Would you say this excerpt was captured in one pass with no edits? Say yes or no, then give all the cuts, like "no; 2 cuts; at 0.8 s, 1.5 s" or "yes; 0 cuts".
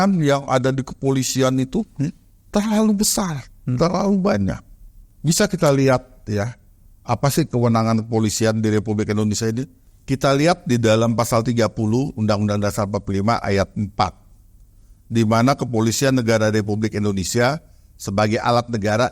yes; 0 cuts